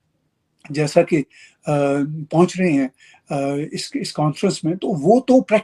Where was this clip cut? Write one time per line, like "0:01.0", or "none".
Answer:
none